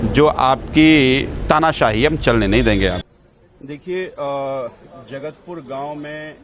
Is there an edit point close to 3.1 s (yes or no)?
yes